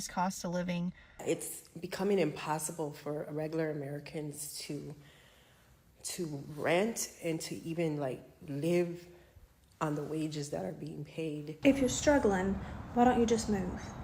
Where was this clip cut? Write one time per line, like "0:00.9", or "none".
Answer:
0:01.2
0:11.5